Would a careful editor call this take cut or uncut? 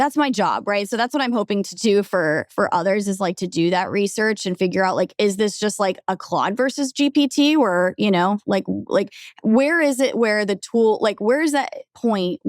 uncut